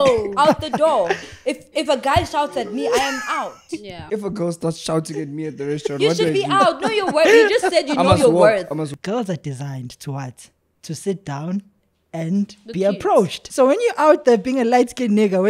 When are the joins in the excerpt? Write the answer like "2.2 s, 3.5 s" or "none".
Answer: 4.0 s, 8.9 s, 13.4 s